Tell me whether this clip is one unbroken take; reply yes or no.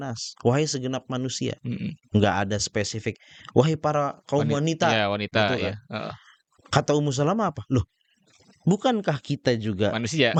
yes